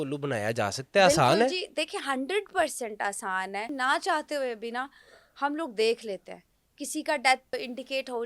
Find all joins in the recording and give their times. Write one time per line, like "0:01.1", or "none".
0:03.7
0:07.5